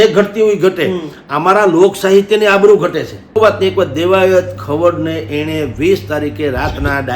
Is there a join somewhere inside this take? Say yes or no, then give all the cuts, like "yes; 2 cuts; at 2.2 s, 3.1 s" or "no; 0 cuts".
yes; 1 cut; at 3.3 s